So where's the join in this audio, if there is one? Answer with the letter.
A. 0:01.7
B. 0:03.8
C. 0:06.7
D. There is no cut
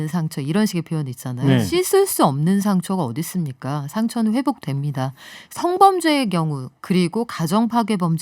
A